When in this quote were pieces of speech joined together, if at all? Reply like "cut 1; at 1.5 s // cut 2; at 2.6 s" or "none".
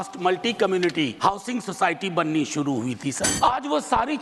cut 1; at 1.1 s // cut 2; at 3.3 s